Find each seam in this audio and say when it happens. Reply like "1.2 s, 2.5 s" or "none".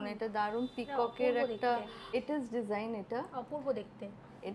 2.1 s